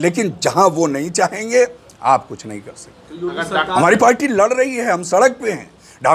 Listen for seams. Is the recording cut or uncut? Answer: cut